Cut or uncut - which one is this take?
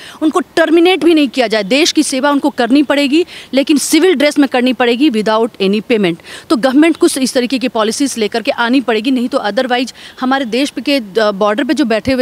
uncut